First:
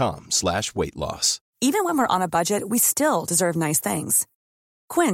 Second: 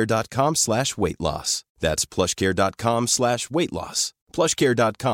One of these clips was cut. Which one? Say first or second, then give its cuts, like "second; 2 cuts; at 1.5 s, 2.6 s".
first; 1 cut; at 1.5 s